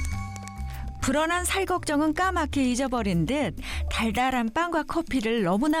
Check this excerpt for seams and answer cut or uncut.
uncut